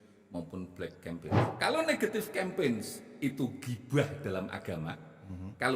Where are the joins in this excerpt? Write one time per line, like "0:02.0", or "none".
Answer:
0:01.4